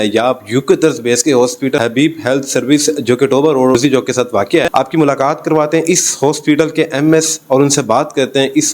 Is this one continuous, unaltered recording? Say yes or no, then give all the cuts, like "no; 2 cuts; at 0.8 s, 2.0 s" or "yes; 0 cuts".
yes; 0 cuts